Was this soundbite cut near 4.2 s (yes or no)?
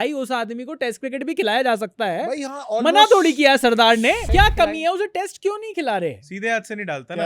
yes